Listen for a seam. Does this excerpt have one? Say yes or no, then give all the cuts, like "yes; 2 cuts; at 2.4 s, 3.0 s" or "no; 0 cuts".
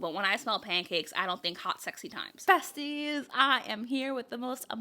yes; 1 cut; at 2.3 s